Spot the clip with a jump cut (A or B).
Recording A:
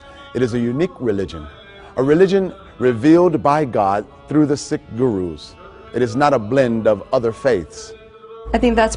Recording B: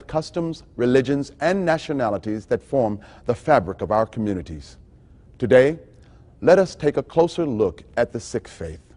A